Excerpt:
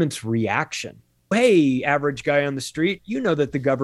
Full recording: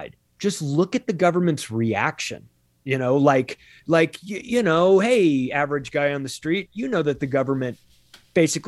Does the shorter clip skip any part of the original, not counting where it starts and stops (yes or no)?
yes